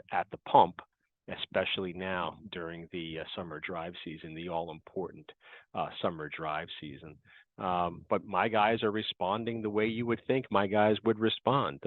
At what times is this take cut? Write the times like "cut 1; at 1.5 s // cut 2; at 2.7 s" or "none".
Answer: none